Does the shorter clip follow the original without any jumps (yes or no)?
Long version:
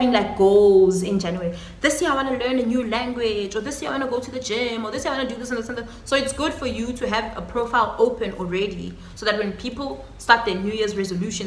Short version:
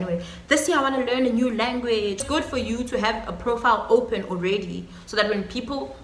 no